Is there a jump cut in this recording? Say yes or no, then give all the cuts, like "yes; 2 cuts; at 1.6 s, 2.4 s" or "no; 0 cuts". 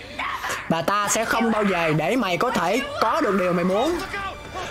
no; 0 cuts